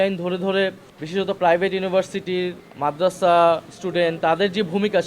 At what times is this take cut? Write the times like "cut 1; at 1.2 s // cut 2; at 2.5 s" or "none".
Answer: cut 1; at 0.9 s